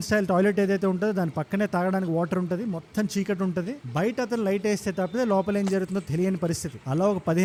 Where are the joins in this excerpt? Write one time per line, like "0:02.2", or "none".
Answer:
none

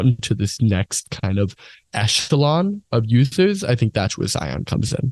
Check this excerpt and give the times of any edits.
none

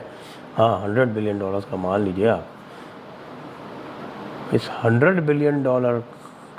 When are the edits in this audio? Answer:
none

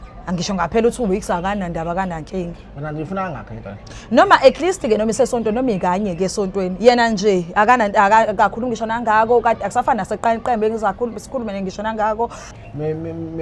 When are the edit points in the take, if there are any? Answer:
0:12.5

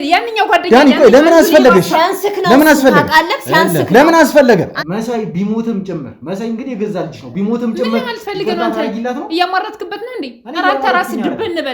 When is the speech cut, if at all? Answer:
0:04.7

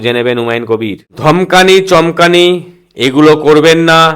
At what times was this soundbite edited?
0:01.1

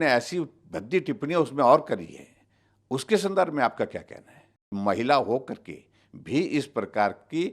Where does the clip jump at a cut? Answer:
0:04.7

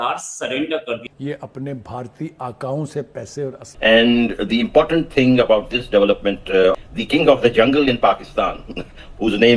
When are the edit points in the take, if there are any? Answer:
0:01.0
0:03.6
0:06.9

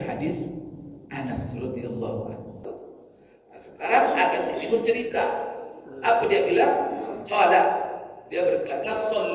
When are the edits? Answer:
0:02.6

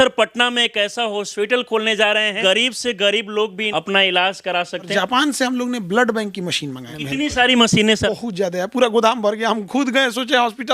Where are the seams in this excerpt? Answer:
0:01.3
0:02.4
0:03.6
0:04.9
0:06.9
0:08.0

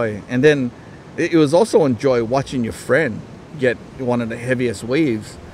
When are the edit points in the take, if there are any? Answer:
none

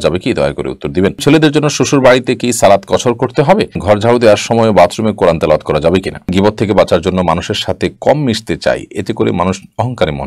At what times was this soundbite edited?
0:01.2
0:03.8
0:06.3

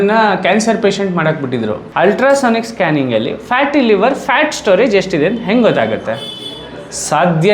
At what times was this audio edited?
0:01.8

